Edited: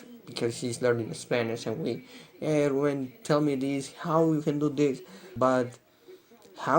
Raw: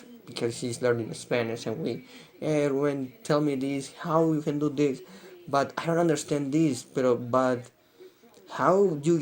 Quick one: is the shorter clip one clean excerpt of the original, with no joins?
no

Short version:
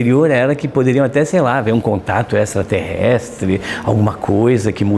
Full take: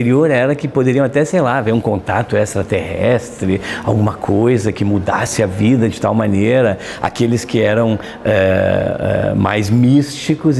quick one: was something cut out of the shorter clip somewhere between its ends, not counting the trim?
no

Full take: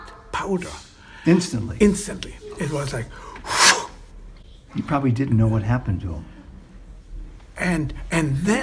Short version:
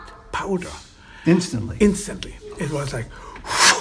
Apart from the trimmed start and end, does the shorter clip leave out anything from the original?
no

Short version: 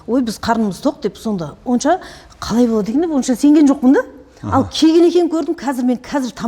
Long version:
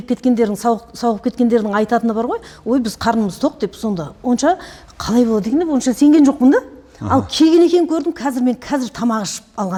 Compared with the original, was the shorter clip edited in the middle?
no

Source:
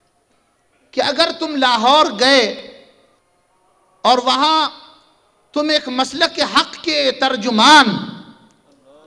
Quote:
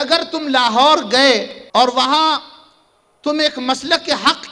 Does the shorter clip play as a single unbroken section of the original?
no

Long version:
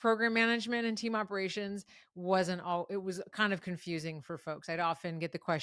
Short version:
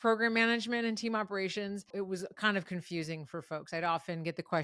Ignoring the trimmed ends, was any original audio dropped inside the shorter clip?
yes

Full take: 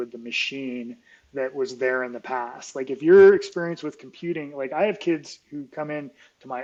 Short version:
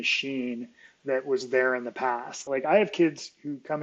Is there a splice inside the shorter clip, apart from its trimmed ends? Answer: yes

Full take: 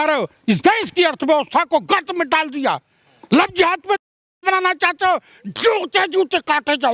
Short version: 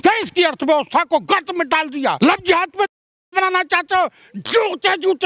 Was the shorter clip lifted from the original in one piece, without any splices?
no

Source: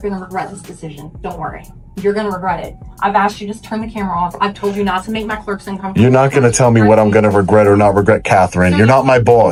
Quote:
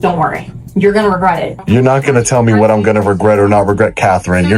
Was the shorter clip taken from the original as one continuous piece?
no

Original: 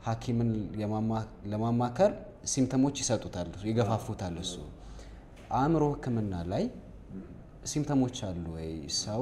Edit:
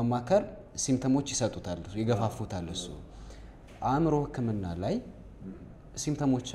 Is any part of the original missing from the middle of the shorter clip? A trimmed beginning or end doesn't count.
no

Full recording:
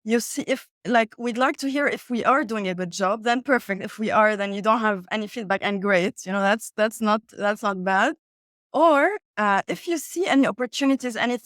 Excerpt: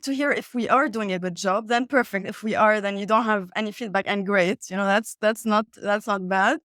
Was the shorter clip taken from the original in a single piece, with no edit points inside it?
yes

